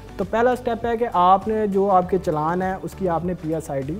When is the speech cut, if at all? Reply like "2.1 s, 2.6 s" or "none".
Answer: none